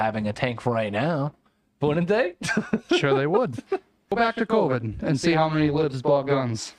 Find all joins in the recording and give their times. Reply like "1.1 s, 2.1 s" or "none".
4.1 s